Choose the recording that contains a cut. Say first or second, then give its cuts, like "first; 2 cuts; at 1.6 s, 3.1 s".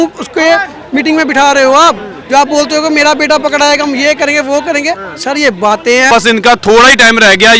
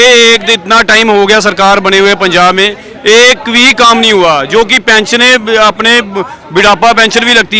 first; 1 cut; at 6.1 s